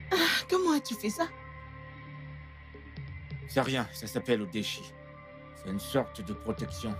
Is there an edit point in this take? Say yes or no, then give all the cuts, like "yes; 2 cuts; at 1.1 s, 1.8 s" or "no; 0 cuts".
yes; 2 cuts; at 1.3 s, 2.8 s